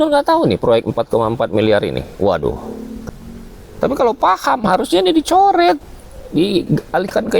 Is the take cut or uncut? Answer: cut